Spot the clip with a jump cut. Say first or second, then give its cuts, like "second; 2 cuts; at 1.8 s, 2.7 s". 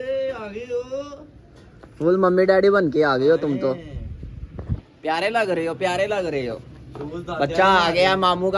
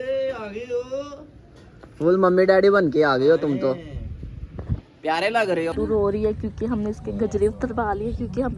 second; 1 cut; at 5.7 s